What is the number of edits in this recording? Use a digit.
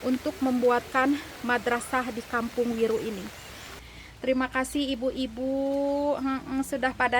1